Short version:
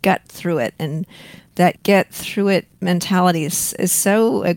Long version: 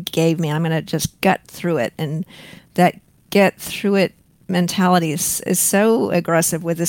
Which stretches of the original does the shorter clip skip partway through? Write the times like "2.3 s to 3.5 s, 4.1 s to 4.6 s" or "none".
3.0 s to 3.3 s, 4.2 s to 4.4 s